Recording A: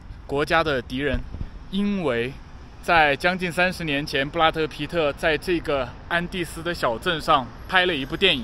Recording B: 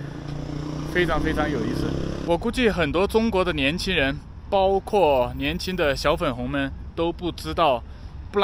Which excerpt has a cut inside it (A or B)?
B